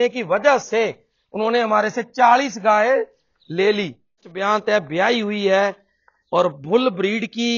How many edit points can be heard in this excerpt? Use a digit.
1